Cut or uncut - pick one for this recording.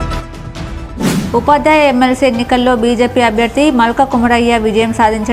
uncut